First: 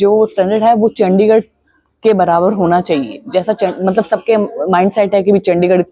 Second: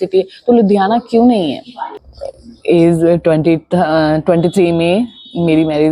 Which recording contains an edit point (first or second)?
second